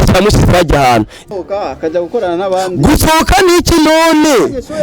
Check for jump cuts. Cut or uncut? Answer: cut